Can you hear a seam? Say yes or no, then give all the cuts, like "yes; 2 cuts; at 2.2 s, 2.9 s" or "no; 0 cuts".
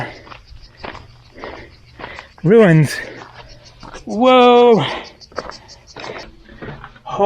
yes; 1 cut; at 6.3 s